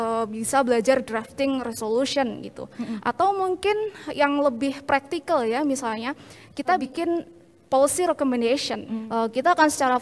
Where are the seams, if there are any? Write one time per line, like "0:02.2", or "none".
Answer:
0:06.9
0:09.0